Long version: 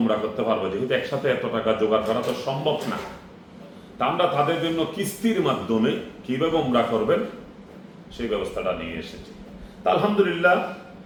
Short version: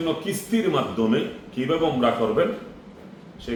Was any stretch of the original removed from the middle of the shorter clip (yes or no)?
no